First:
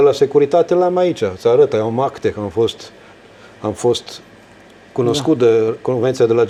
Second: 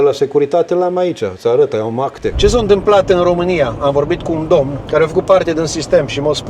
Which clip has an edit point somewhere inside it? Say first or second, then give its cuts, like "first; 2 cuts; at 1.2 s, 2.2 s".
second; 2 cuts; at 2.2 s, 4.8 s